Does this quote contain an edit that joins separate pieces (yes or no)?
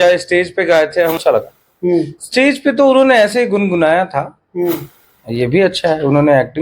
yes